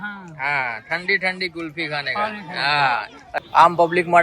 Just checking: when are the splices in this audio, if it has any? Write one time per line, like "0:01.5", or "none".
0:03.2